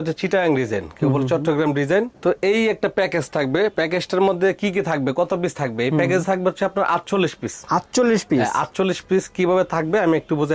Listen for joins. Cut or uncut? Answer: uncut